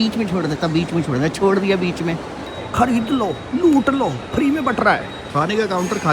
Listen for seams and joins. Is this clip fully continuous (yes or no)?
no